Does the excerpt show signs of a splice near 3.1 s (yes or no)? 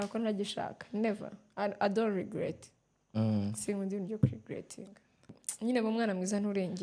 no